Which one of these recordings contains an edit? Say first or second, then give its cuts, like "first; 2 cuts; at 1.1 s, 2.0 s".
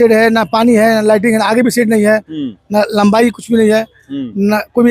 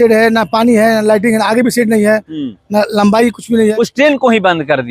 second; 1 cut; at 3.7 s